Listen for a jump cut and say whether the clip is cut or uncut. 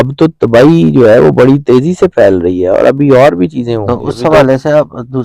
cut